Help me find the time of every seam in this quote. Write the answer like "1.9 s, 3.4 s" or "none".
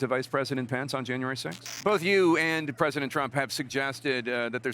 1.9 s